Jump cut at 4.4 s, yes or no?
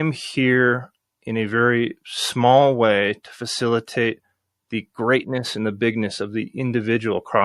no